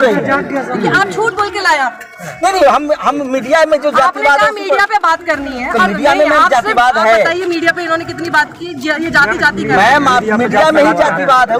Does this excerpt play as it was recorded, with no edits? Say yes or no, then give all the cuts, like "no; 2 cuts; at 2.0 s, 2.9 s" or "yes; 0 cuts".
yes; 0 cuts